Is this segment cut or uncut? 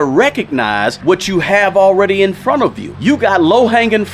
cut